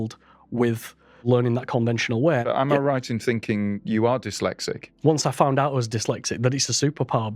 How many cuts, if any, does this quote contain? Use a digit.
4